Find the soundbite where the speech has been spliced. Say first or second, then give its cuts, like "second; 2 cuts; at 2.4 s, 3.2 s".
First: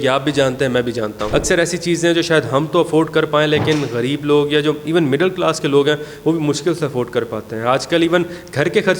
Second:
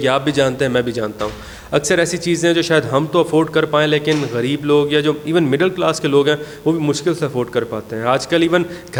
first; 1 cut; at 1.2 s